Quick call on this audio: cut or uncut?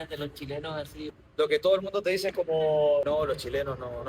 cut